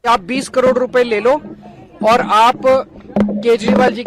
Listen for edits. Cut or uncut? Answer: uncut